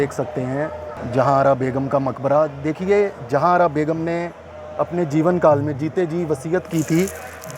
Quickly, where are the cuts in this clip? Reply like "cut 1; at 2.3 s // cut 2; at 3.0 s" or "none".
cut 1; at 0.9 s